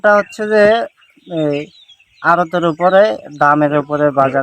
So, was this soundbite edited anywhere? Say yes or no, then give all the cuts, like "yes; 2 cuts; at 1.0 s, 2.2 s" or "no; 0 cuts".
no; 0 cuts